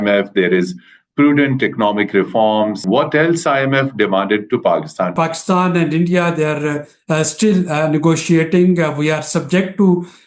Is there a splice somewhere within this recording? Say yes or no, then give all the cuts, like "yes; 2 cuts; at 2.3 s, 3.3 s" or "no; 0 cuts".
yes; 2 cuts; at 2.8 s, 5.1 s